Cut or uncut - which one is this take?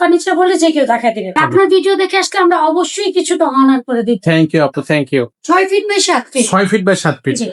cut